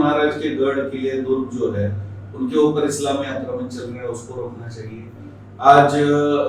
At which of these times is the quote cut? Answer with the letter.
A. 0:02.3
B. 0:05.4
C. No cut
C